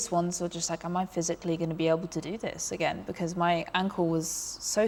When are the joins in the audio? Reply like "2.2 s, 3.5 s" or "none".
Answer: none